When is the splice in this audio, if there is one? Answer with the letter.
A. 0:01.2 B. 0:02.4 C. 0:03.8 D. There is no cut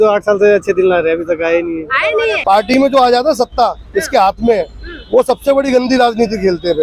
B